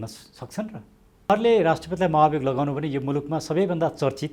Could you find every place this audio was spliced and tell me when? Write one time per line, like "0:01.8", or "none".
0:01.3